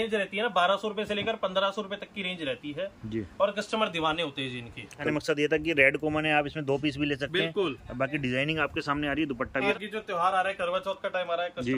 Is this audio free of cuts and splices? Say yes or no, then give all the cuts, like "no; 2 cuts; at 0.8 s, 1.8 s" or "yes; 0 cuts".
no; 2 cuts; at 5.0 s, 9.7 s